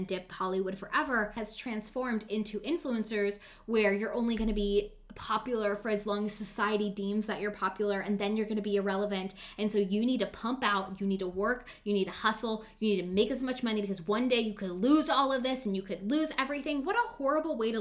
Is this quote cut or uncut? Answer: cut